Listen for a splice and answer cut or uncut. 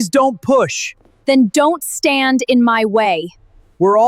uncut